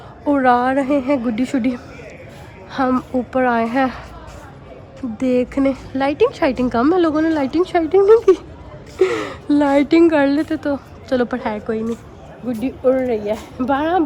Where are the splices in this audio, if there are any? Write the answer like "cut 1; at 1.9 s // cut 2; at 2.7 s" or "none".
none